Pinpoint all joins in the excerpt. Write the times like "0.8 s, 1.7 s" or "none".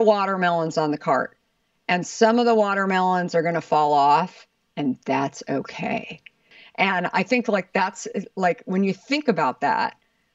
6.4 s

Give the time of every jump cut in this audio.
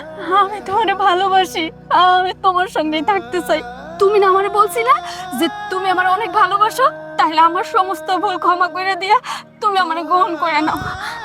3.8 s

